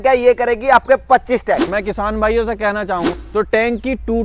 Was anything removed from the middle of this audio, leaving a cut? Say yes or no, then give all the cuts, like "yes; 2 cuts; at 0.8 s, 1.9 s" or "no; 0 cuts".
no; 0 cuts